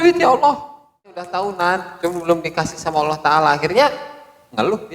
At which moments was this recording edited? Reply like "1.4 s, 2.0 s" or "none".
1.2 s